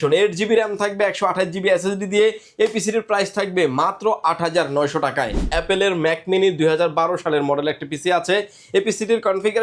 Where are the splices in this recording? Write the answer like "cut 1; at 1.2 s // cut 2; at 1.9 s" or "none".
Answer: cut 1; at 5.5 s

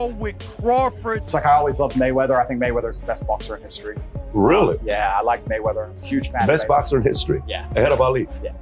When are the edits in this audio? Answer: cut 1; at 1.2 s

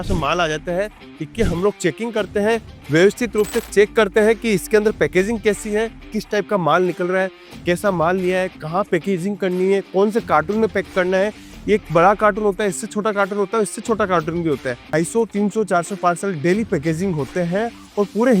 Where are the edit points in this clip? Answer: cut 1; at 6.1 s // cut 2; at 14.8 s

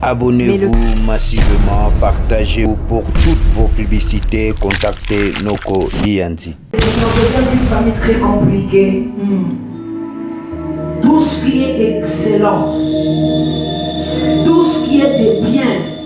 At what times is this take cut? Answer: cut 1; at 6.8 s

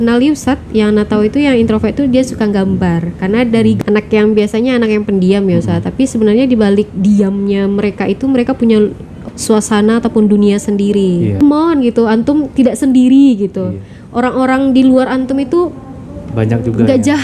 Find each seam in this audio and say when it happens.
cut 1; at 3.8 s // cut 2; at 9.1 s // cut 3; at 11.4 s

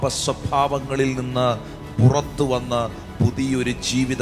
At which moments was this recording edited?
none

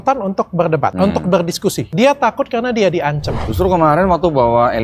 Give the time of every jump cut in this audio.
cut 1; at 0.9 s // cut 2; at 1.8 s // cut 3; at 3.3 s

